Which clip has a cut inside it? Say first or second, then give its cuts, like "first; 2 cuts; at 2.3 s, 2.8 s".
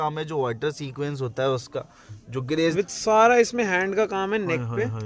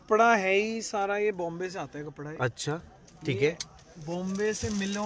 first; 1 cut; at 2.7 s